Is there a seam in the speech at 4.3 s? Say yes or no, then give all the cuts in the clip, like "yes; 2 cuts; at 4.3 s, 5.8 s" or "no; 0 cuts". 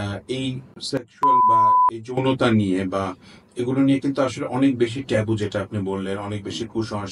no; 2 cuts; at 1.1 s, 2.2 s